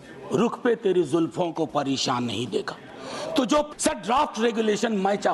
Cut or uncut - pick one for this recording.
cut